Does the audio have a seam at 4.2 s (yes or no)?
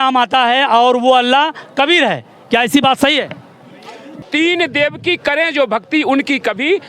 yes